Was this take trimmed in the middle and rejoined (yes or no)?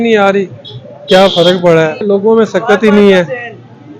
yes